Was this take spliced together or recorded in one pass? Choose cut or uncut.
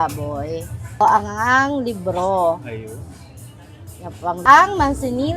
cut